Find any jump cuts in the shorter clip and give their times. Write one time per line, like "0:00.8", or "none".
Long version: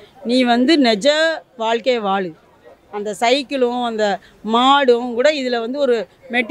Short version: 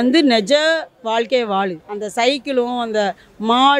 0:01.9